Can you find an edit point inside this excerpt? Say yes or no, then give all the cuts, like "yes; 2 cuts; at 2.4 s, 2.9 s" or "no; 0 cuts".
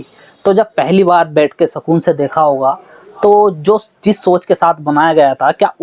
no; 0 cuts